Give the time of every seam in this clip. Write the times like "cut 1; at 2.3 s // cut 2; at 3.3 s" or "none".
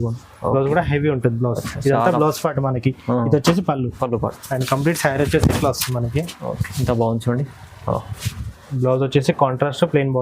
cut 1; at 8.2 s